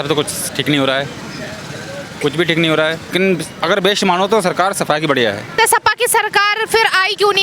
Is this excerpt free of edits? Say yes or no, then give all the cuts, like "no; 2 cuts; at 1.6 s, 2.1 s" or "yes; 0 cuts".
no; 2 cuts; at 3.1 s, 5.5 s